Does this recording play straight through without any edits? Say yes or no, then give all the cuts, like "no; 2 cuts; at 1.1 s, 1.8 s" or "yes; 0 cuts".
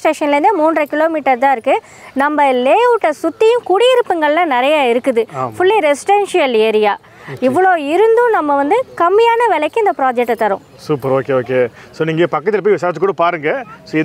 yes; 0 cuts